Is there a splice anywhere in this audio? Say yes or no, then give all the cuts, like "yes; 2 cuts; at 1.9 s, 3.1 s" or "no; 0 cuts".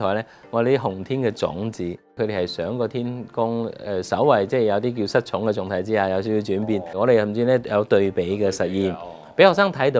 yes; 2 cuts; at 2.2 s, 7.0 s